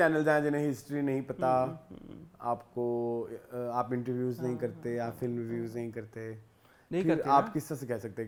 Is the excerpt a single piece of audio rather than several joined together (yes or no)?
yes